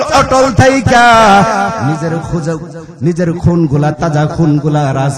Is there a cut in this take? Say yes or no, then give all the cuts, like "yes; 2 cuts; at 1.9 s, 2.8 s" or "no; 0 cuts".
no; 0 cuts